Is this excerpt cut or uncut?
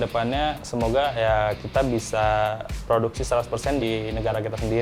cut